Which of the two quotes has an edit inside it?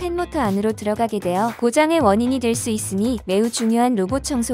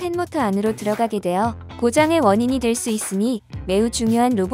first; 2 cuts; at 1.5 s, 3.2 s

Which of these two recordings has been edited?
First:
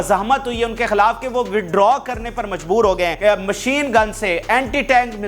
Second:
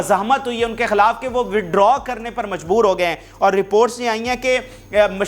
first; 1 cut; at 3.1 s

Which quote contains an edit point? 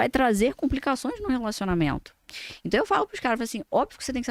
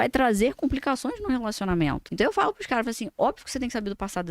second; 1 cut; at 2.0 s

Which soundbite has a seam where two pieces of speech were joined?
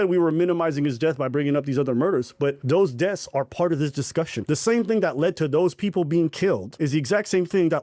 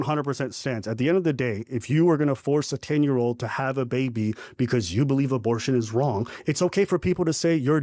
first; 3 cuts; at 2.6 s, 4.4 s, 6.7 s

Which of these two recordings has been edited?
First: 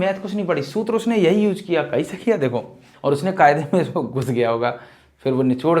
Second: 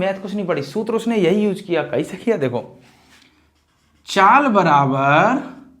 first; 1 cut; at 2.9 s

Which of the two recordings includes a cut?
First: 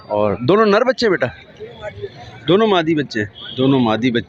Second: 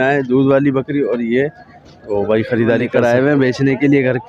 second; 1 cut; at 2.9 s

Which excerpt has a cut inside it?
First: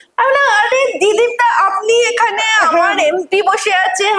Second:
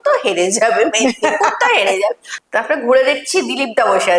second; 1 cut; at 2.3 s

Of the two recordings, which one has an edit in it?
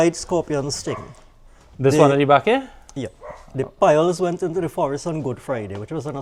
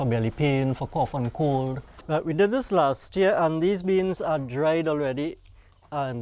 second; 1 cut; at 1.9 s

